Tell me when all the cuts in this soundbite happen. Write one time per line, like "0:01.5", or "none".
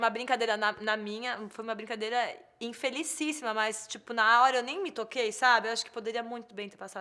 none